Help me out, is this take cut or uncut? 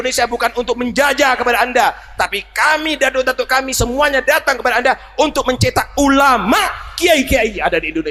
uncut